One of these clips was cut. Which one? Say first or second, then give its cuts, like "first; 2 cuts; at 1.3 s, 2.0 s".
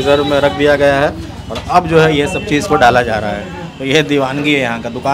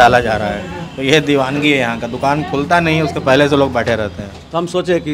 second; 1 cut; at 4.2 s